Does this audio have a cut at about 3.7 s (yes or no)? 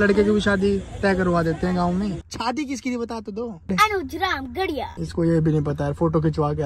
yes